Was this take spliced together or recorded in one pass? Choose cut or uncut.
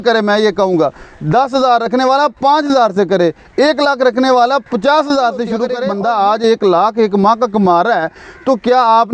cut